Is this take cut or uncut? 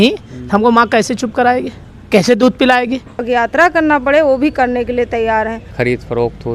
cut